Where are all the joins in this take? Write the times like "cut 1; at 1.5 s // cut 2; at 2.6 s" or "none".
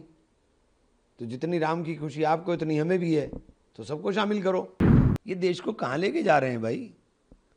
cut 1; at 4.7 s

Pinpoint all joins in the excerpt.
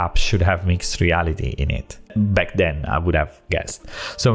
cut 1; at 2.1 s

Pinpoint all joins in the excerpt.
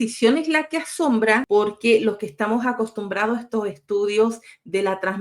cut 1; at 1.4 s

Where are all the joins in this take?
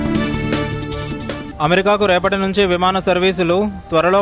cut 1; at 1.5 s

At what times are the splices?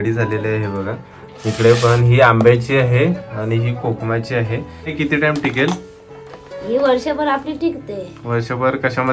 cut 1; at 4.9 s

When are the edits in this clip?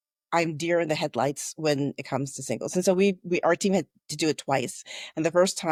none

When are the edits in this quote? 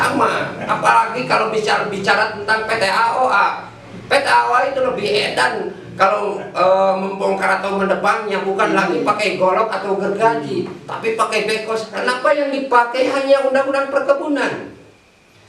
cut 1; at 11.9 s

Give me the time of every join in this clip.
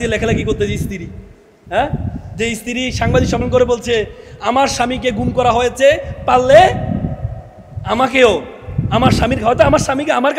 none

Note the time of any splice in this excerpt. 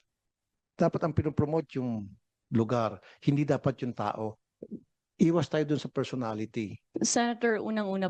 cut 1; at 6.8 s

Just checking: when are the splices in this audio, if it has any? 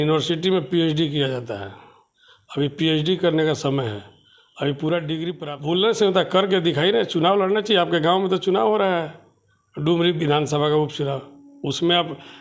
cut 1; at 5.4 s

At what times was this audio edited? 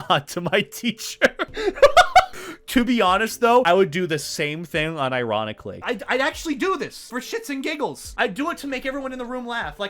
none

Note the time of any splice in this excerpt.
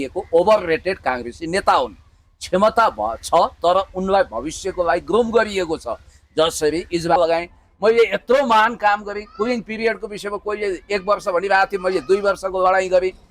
cut 1; at 7.2 s

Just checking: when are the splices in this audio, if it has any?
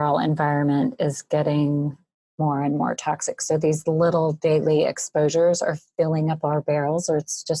none

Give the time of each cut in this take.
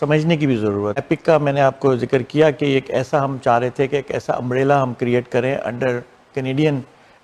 cut 1; at 1.0 s

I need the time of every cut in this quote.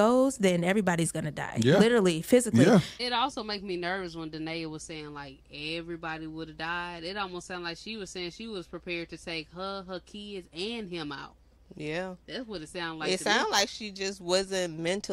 cut 1; at 3.0 s

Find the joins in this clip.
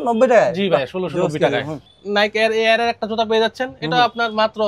cut 1; at 1.9 s

